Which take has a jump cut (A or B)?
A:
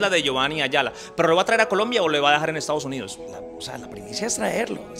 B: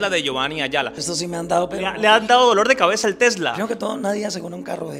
B